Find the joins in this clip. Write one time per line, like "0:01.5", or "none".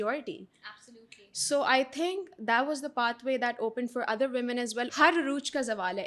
0:04.9